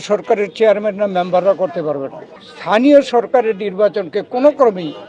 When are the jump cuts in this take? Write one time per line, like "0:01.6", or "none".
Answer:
0:02.8